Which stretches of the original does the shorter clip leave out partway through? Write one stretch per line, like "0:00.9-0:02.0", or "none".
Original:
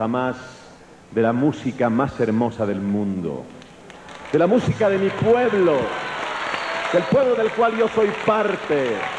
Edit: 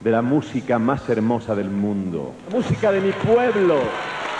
0:03.6-0:04.5

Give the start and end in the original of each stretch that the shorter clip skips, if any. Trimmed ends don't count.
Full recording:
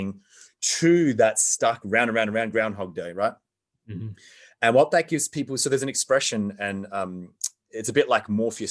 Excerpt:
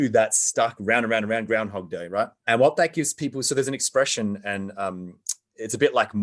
0:03.4-0:04.5

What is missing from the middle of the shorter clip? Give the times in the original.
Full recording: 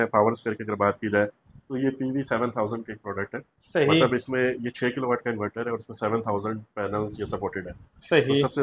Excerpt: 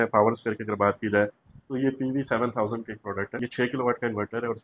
0:03.4-0:04.7

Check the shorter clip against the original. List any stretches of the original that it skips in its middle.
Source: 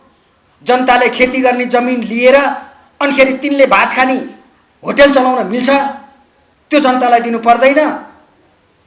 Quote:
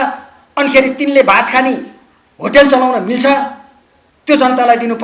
none

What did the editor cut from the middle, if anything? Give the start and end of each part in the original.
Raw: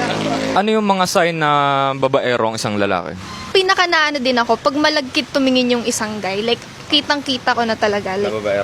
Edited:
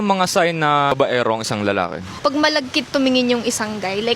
0:01.7-0:02.1
0:03.3-0:04.6

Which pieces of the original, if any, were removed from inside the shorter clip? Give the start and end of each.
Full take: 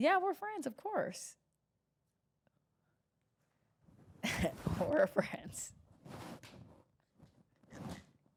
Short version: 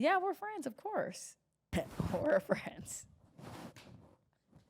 0:01.7-0:04.3

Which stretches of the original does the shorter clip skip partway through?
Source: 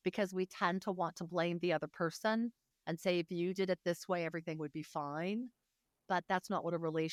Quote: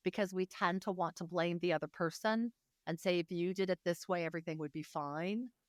none

